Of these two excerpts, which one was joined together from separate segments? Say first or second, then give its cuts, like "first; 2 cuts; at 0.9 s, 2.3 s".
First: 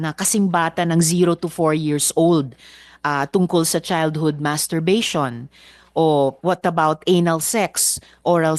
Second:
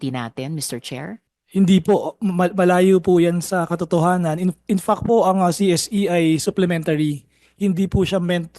second; 1 cut; at 1.3 s